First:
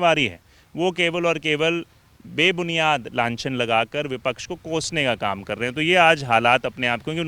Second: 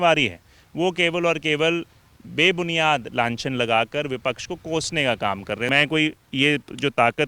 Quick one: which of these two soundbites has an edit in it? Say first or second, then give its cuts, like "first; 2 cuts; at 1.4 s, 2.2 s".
second; 1 cut; at 5.7 s